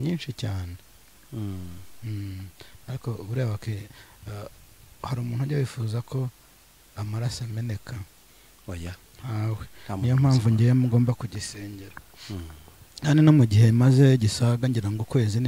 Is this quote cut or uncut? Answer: uncut